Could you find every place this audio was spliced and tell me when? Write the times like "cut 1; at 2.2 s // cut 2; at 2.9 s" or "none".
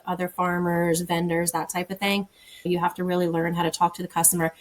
cut 1; at 2.6 s